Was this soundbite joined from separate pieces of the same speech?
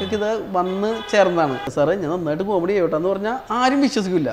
yes; 1 cut; at 1.7 s

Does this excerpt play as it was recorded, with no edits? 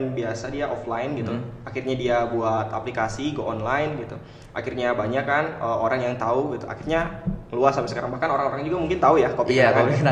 yes; 0 cuts

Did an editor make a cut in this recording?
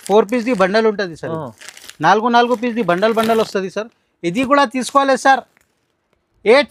no; 0 cuts

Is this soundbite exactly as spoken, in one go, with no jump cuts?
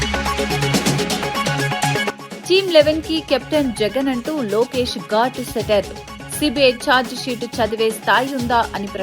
no; 1 cut; at 2.1 s

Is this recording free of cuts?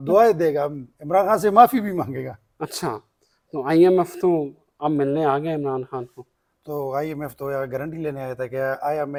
yes; 0 cuts

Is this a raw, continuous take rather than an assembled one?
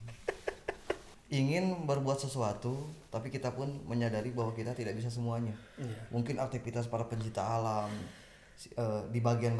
no; 1 cut; at 1.0 s

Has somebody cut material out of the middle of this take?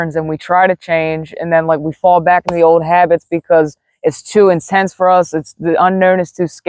no; 0 cuts

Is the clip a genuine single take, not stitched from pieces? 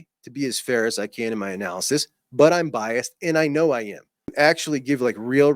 no; 1 cut; at 4.2 s

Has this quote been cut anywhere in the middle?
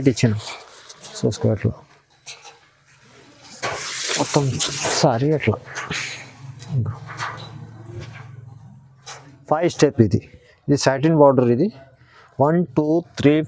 no; 0 cuts

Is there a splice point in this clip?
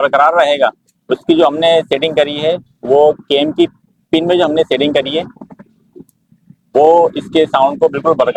no; 0 cuts

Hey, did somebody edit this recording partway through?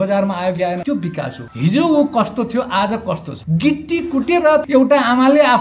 yes; 3 cuts; at 1.0 s, 3.3 s, 4.6 s

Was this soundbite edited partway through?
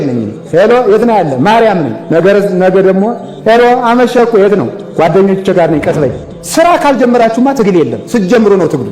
yes; 2 cuts; at 2.0 s, 6.3 s

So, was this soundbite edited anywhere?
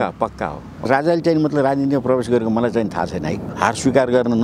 yes; 2 cuts; at 0.8 s, 3.5 s

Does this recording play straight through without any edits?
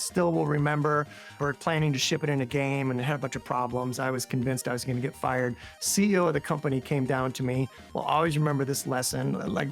no; 1 cut; at 1.3 s

